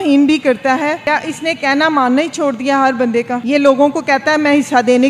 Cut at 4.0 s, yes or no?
no